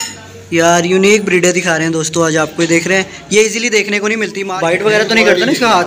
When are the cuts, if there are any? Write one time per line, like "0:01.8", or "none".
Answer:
0:04.4